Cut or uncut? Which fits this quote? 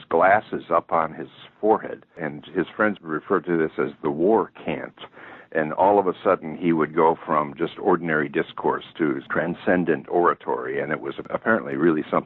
cut